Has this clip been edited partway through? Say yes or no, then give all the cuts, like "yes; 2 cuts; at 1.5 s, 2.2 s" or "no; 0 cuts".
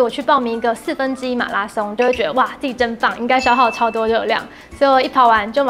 yes; 1 cut; at 2.0 s